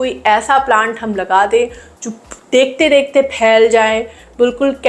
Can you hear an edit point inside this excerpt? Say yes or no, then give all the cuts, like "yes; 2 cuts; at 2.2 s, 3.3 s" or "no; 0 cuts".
no; 0 cuts